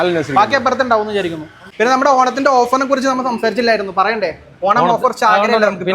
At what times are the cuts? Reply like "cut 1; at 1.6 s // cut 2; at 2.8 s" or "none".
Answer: cut 1; at 1.6 s